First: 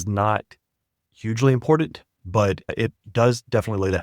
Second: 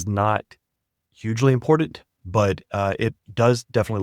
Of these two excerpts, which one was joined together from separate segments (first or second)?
first